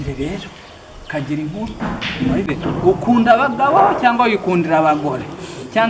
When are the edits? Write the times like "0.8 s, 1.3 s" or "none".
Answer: 2.5 s